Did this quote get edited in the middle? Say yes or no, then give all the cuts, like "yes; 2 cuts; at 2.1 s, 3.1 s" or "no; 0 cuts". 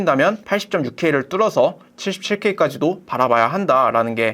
yes; 1 cut; at 1.9 s